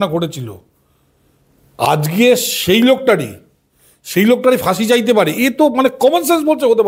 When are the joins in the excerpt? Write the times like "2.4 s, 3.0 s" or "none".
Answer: none